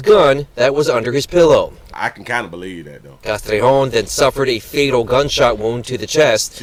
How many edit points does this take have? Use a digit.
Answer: 0